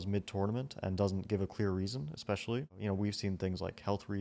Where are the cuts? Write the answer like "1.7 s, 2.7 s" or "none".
2.7 s